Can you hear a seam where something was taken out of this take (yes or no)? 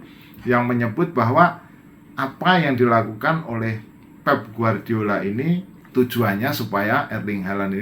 yes